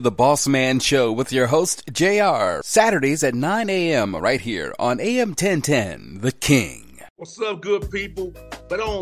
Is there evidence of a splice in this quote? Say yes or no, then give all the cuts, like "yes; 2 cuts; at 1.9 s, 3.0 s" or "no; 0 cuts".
yes; 1 cut; at 7.2 s